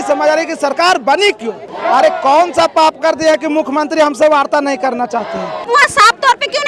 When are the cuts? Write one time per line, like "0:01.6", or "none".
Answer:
0:01.7
0:05.6